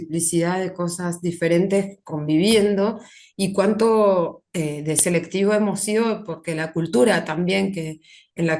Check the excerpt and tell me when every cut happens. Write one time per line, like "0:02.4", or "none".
none